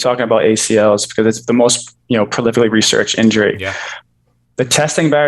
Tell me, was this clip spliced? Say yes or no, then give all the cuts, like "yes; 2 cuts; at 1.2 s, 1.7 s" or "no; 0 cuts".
no; 0 cuts